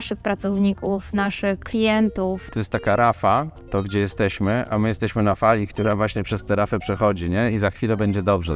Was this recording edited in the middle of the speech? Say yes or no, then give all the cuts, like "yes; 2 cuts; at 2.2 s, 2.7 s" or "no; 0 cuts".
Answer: yes; 2 cuts; at 2.5 s, 3.6 s